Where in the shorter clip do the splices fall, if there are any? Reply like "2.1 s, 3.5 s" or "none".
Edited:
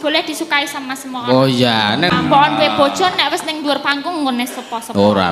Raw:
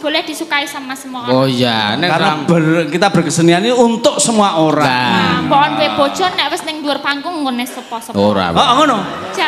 2.1 s